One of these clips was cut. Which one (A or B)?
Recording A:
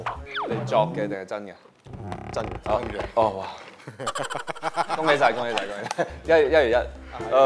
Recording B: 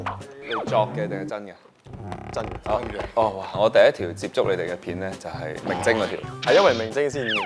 B